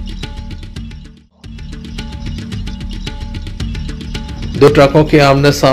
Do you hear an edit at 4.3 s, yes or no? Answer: yes